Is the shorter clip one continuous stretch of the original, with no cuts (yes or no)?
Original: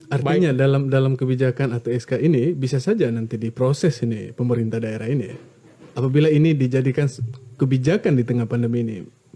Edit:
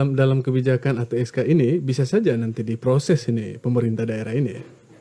yes